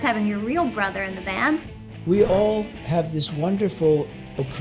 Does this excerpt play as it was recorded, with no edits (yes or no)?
no